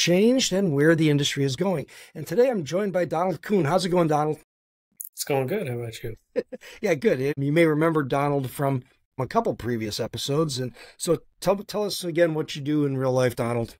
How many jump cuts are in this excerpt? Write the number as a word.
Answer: two